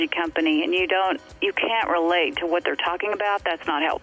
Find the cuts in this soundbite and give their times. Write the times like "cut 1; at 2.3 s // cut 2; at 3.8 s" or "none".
none